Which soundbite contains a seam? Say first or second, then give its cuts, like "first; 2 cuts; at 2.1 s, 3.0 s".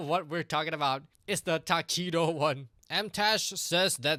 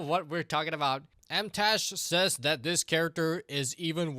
second; 1 cut; at 1.1 s